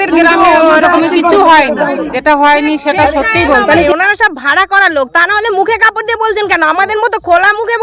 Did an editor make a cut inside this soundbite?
yes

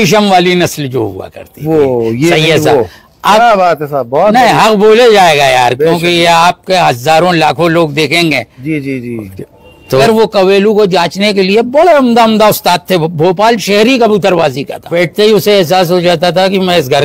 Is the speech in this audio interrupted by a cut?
yes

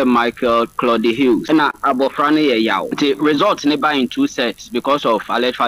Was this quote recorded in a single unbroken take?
no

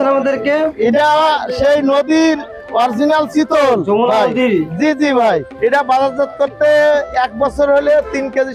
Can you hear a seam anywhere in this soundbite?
yes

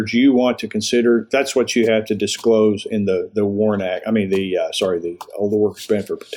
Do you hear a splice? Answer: no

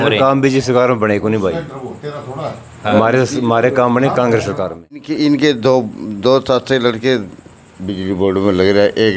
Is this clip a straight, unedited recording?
no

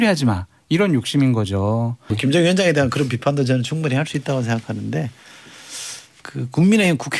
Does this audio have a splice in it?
yes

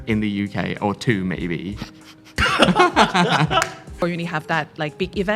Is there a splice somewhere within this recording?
yes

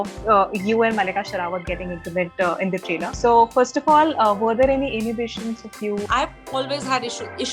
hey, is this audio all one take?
no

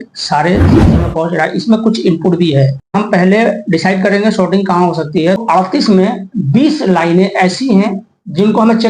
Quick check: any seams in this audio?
yes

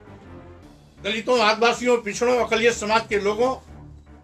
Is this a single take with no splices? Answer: no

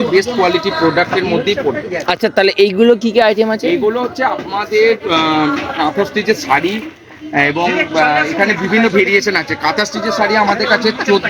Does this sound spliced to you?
no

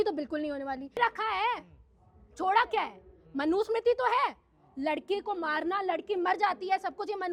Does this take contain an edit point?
yes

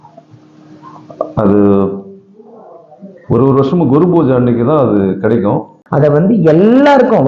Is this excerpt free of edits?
no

